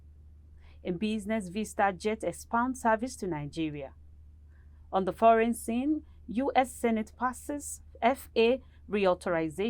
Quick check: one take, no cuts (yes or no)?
yes